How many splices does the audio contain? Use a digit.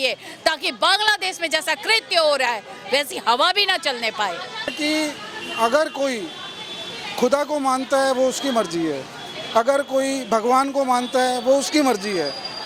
1